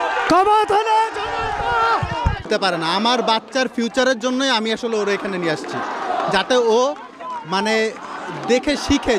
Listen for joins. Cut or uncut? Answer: cut